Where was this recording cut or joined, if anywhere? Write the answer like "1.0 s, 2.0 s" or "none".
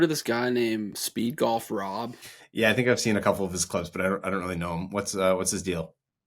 1.0 s